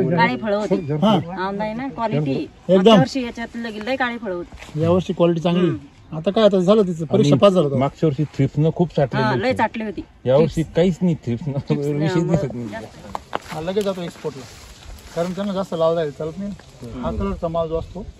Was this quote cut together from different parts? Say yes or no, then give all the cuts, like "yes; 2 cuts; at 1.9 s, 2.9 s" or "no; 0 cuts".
yes; 1 cut; at 12.7 s